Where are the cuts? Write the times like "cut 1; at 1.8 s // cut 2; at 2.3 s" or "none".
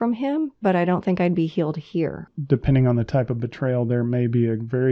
cut 1; at 2.3 s